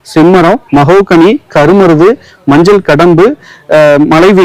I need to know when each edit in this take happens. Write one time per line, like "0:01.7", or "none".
none